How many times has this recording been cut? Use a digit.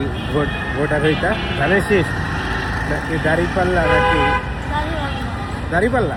0